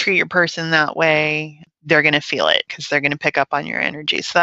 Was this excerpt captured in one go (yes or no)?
no